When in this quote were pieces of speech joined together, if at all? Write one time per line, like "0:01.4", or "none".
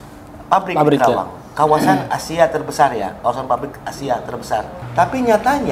0:04.8